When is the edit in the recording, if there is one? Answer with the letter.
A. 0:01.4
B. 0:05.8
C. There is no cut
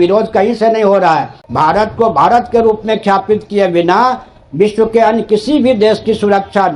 A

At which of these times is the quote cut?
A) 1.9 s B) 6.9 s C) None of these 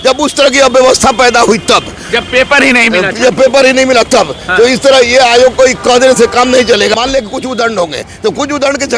B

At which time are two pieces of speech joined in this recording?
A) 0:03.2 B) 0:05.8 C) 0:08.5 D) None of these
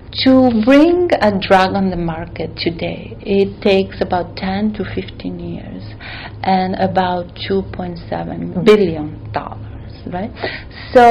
C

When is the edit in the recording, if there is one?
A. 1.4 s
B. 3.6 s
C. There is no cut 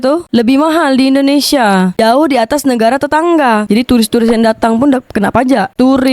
B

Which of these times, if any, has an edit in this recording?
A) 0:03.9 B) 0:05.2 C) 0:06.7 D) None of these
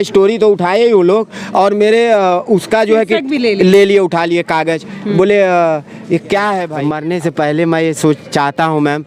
C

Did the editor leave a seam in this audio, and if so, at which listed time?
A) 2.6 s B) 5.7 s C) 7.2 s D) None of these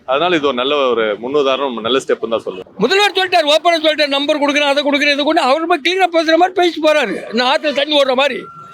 A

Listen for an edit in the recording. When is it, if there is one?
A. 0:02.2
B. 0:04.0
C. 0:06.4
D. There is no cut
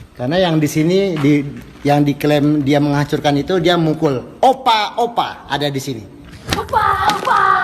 C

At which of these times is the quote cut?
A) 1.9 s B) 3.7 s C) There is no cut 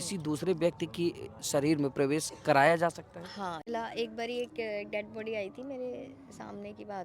B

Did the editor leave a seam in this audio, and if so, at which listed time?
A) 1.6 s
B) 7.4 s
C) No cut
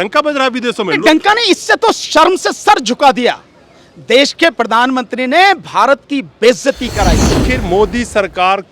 B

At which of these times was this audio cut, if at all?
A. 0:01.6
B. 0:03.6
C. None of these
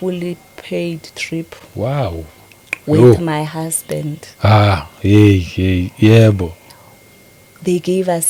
C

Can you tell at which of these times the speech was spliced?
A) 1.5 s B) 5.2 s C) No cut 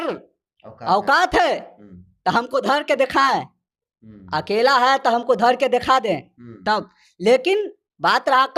C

